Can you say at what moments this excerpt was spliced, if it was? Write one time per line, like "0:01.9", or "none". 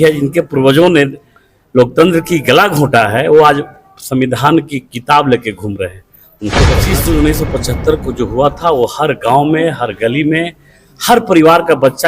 0:06.7